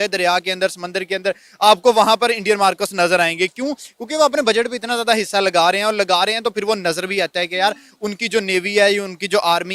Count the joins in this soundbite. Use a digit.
0